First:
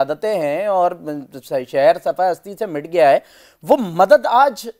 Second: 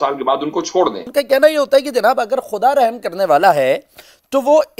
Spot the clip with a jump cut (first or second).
second